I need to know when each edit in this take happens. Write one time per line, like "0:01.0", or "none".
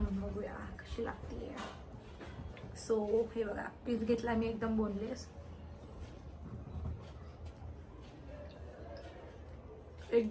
none